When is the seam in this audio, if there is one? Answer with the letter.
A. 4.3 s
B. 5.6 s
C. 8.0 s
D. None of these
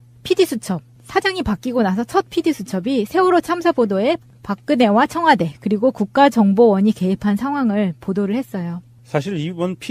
C